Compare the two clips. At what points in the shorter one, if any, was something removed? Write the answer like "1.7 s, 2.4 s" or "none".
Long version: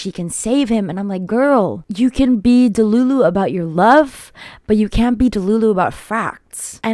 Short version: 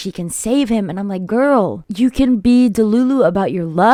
none